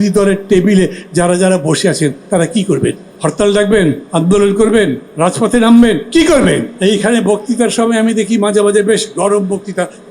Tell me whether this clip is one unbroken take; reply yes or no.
no